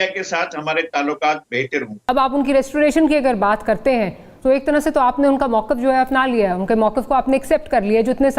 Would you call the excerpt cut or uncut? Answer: cut